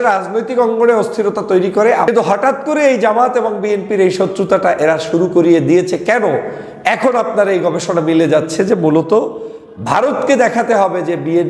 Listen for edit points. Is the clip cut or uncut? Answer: cut